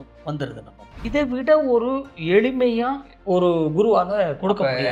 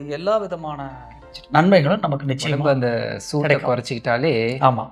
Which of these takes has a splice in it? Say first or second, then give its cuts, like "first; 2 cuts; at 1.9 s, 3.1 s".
first; 1 cut; at 1.0 s